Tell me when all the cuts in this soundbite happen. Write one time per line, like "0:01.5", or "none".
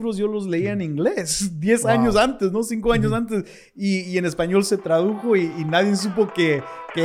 none